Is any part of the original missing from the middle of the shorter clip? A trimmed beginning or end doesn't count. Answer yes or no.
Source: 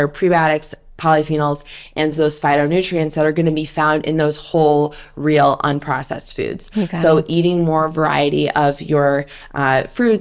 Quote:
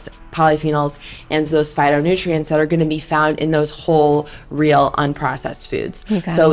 no